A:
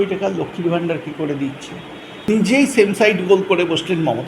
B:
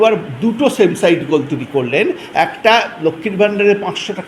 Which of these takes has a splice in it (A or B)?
A